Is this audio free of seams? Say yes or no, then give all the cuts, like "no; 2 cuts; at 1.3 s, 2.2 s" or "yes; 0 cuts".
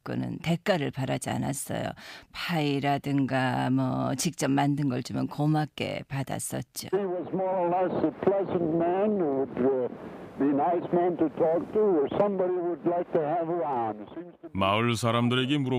yes; 0 cuts